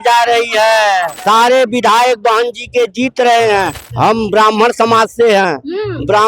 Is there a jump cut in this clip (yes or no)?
yes